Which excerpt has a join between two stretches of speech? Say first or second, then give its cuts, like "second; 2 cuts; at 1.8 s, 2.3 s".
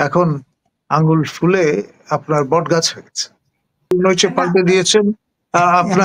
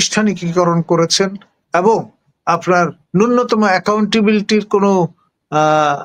first; 1 cut; at 3.9 s